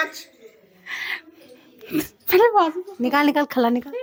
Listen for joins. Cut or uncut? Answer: uncut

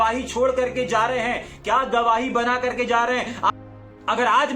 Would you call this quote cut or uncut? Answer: cut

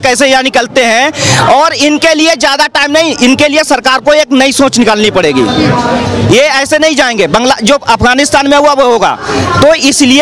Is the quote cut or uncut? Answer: uncut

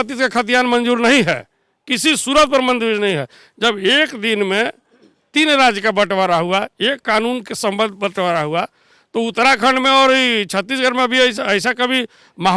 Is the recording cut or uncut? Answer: uncut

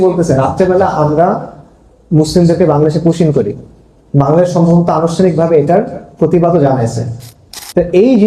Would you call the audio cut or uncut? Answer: uncut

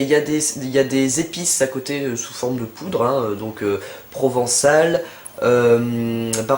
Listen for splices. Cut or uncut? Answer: cut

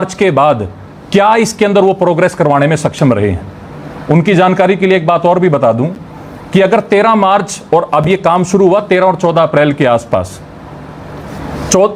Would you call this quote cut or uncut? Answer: uncut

